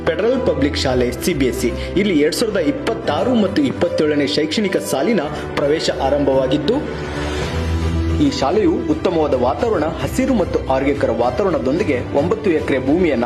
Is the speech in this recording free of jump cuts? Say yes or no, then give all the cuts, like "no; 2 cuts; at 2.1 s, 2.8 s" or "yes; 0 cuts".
yes; 0 cuts